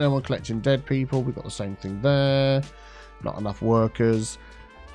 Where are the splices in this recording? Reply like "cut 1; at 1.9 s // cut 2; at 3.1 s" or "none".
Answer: none